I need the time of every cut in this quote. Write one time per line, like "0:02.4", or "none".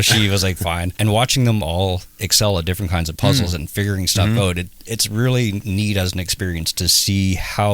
0:00.9
0:05.6